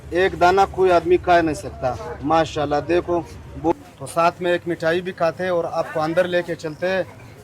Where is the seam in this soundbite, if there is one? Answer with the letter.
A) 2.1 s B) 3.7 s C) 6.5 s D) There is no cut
B